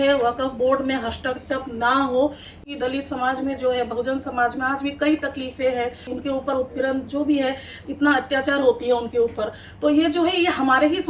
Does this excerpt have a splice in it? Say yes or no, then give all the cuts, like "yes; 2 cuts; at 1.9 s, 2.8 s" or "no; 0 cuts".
yes; 2 cuts; at 2.7 s, 6.1 s